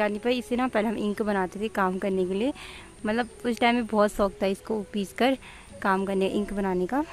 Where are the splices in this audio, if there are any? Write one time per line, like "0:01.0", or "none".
none